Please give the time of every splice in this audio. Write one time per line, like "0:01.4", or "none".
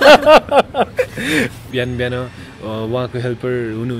0:01.6